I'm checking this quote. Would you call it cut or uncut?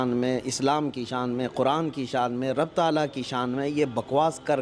uncut